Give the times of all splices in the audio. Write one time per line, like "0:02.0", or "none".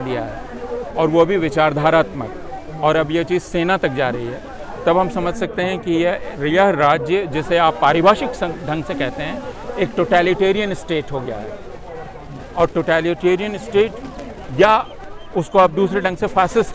none